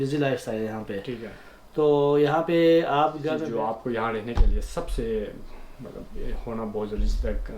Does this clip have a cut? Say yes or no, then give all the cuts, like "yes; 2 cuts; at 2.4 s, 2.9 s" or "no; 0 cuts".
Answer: yes; 1 cut; at 3.4 s